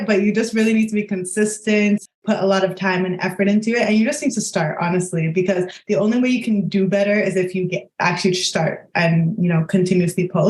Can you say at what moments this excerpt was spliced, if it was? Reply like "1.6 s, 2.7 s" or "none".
2.0 s